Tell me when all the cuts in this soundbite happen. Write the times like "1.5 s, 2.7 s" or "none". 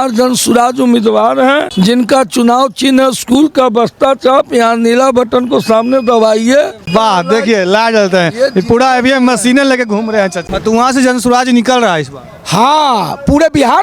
1.7 s, 6.8 s, 10.5 s